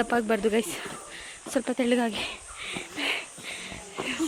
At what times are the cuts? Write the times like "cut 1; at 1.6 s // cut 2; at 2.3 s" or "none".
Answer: none

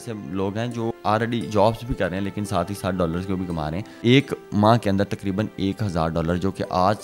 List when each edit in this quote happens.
cut 1; at 1.0 s // cut 2; at 3.9 s

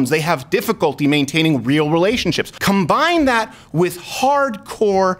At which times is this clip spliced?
cut 1; at 2.5 s

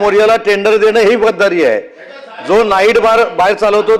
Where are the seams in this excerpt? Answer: none

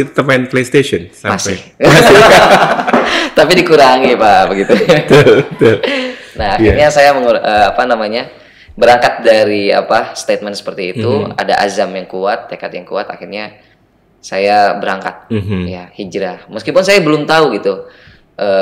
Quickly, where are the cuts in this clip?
none

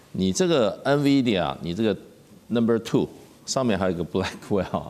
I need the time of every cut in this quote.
none

